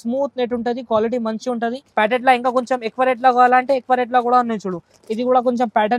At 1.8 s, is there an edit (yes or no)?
yes